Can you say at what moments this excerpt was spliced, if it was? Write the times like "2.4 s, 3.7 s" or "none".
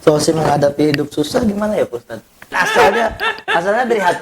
2.5 s